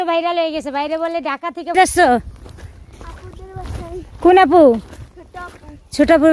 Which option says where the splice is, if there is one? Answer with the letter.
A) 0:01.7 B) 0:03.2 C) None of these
A